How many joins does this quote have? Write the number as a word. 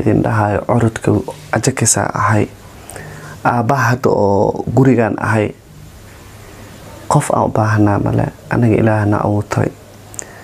zero